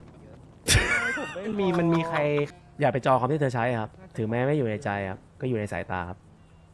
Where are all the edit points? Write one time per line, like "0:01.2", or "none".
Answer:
0:02.5
0:04.0
0:05.3